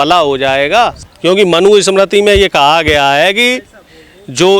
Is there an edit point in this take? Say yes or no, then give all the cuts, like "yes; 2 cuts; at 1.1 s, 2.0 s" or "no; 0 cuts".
yes; 1 cut; at 1.0 s